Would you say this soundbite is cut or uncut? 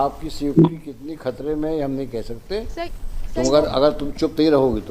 cut